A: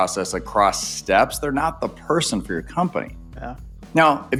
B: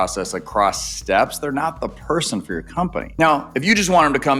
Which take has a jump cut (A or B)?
B